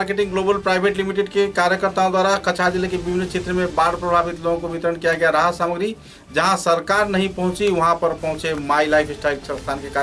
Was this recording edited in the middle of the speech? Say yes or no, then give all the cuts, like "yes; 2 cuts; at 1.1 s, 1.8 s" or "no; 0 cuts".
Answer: no; 0 cuts